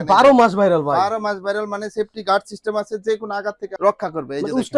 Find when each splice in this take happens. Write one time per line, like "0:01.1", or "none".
none